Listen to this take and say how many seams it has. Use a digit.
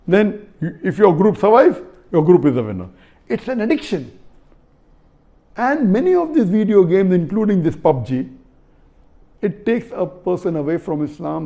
0